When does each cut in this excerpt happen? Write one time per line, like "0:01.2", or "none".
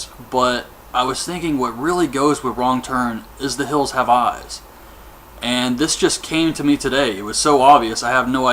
0:07.5